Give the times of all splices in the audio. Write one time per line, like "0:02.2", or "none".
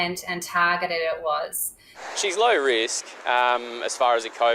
0:02.0

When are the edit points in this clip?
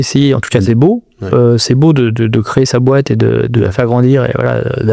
none

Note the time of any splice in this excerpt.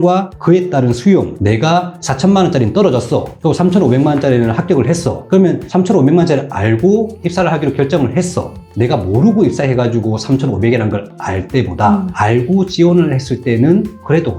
0:01.3

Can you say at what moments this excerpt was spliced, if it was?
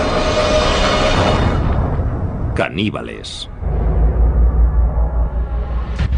0:03.8

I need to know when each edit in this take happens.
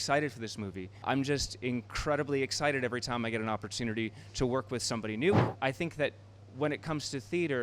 0:01.0
0:05.5

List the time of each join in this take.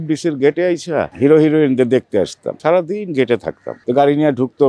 0:02.5

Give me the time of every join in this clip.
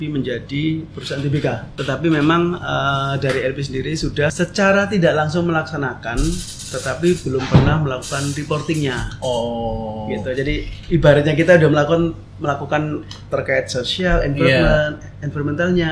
0:01.7
0:04.3

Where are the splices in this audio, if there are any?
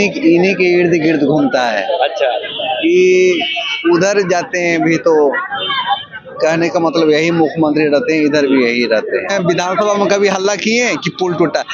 0:09.3

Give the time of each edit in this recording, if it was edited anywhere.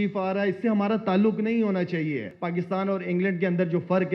0:02.3

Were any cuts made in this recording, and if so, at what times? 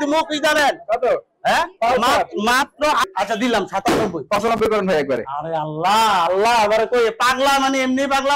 0:03.1

